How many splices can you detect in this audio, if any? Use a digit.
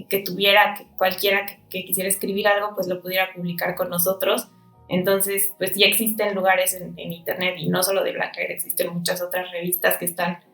0